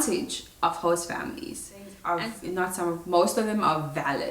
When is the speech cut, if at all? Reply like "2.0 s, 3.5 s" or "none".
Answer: 1.9 s